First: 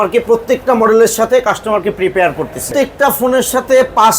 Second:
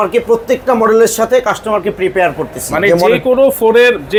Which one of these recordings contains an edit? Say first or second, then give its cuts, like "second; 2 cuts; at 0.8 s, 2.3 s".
first; 1 cut; at 2.7 s